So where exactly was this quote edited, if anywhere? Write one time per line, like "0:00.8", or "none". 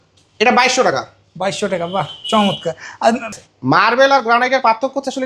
0:03.3